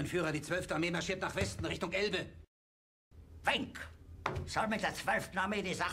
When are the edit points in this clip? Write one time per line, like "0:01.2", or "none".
0:02.5